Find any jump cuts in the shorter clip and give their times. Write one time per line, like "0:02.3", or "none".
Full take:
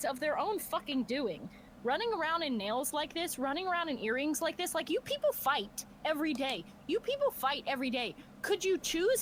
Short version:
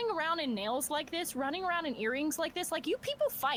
none